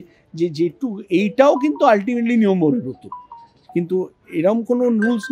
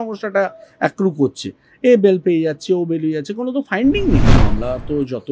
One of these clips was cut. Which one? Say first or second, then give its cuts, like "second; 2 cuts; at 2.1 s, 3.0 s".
second; 1 cut; at 4.4 s